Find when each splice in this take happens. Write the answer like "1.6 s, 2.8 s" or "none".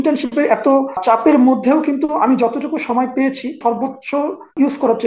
1.0 s, 3.9 s